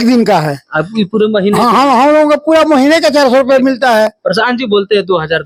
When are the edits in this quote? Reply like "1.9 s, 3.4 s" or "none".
none